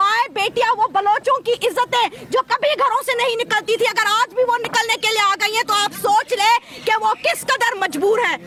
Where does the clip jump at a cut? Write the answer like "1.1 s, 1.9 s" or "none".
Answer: none